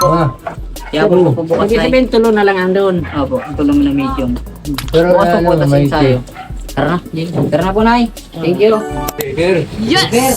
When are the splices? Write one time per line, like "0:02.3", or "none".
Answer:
0:09.3

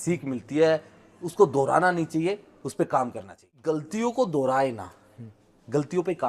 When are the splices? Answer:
0:03.6

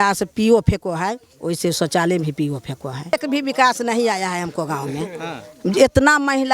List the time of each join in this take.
0:03.1

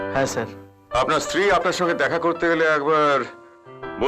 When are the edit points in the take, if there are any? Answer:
none

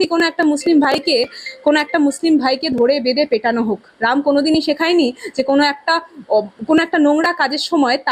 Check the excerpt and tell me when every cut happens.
none

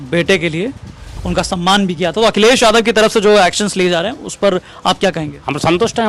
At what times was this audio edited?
0:01.1

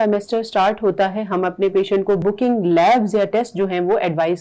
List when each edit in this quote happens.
0:02.2

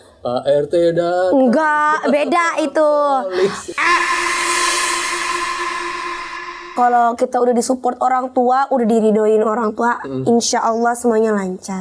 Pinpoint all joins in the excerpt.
0:06.7

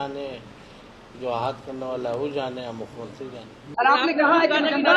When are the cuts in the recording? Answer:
0:03.6

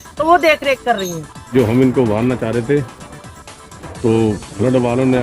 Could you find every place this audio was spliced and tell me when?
0:01.5

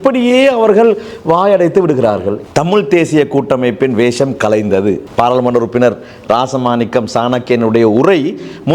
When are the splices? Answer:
0:02.4

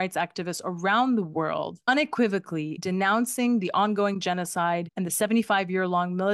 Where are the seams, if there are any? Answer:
0:01.8
0:02.8

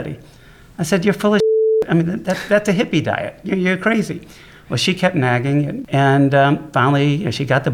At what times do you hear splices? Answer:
0:05.8

